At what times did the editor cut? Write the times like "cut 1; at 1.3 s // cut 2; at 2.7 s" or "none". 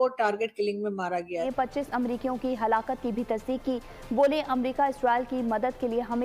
cut 1; at 1.5 s